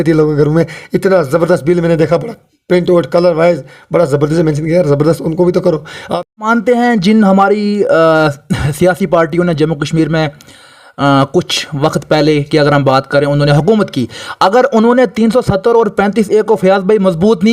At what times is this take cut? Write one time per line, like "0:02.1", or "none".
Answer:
0:06.4